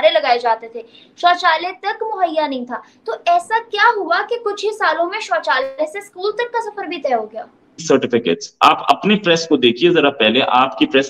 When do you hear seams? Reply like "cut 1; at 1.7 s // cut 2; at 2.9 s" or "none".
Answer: cut 1; at 7.8 s